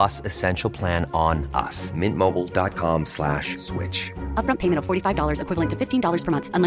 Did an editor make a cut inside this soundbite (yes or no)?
no